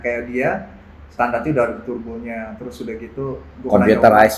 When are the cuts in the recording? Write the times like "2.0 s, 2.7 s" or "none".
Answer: none